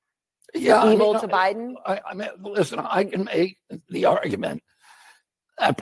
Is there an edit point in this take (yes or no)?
yes